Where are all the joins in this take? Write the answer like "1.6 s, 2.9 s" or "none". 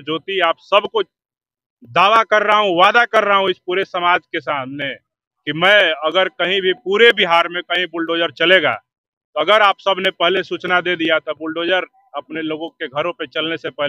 none